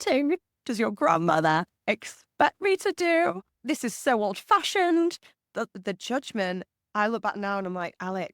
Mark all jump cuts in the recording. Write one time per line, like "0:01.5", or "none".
0:03.6